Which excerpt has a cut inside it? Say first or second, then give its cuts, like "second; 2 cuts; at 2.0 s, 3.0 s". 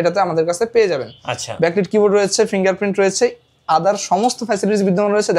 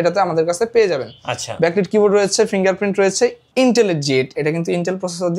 second; 2 cuts; at 3.5 s, 4.3 s